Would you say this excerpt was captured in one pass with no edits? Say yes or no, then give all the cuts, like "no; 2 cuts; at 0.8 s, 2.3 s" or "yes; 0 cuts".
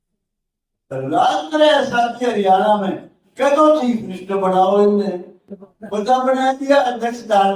yes; 0 cuts